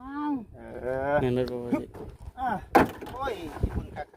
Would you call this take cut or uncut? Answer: cut